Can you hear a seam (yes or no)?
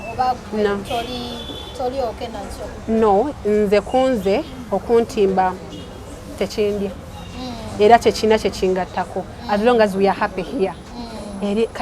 no